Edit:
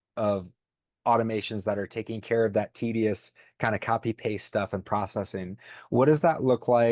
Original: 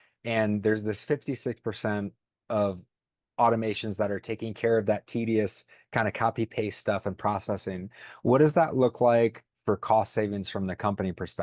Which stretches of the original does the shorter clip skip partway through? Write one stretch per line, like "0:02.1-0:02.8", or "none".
none